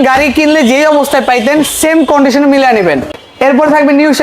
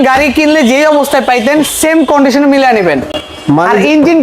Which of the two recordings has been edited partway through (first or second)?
first